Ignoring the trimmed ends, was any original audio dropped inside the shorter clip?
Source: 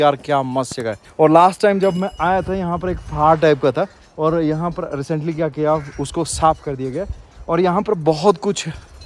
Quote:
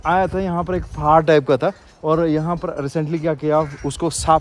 no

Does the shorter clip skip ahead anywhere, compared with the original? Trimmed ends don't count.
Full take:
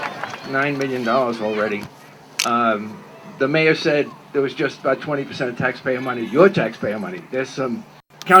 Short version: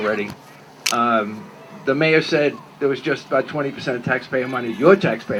no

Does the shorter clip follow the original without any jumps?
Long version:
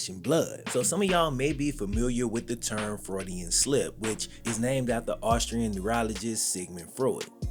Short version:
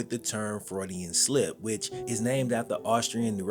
yes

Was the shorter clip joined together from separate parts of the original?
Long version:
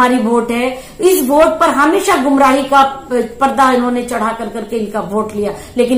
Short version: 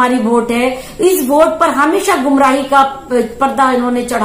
no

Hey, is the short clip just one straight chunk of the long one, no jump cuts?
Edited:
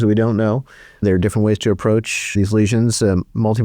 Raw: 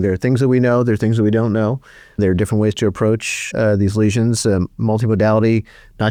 no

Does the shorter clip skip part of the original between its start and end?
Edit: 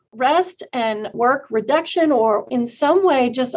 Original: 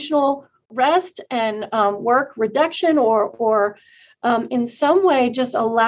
yes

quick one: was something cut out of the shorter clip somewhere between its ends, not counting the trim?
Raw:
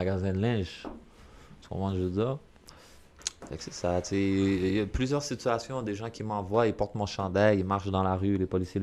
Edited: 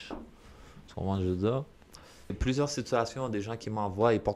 yes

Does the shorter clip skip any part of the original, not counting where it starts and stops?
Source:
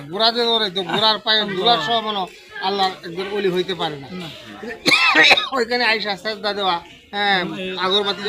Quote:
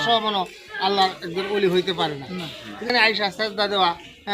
yes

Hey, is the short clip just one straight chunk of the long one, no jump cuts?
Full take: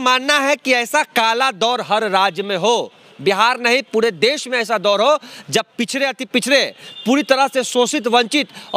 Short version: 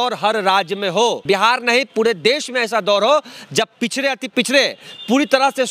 no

